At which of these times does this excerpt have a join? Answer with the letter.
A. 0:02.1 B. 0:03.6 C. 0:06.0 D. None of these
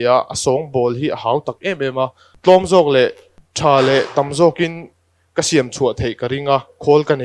D